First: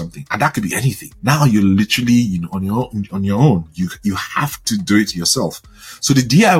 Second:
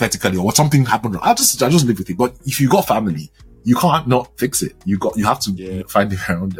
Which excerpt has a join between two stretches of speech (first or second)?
first